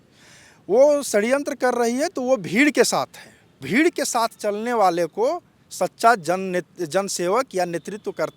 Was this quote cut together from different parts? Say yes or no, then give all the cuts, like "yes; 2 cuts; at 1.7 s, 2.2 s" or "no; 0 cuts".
yes; 1 cut; at 3.6 s